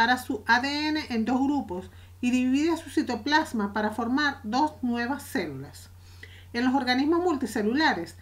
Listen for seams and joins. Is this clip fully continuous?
yes; 0 cuts

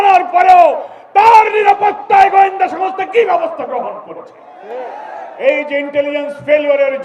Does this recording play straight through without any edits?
yes; 0 cuts

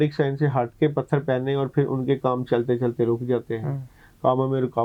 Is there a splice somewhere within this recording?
no; 0 cuts

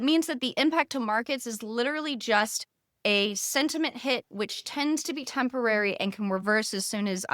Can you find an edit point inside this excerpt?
no; 0 cuts

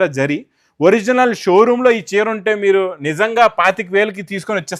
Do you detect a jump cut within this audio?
no; 0 cuts

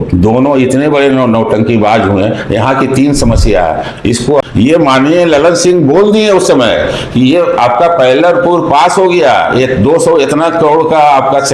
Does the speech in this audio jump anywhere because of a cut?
yes; 1 cut; at 4.4 s

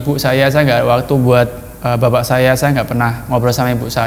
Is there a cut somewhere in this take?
no; 0 cuts

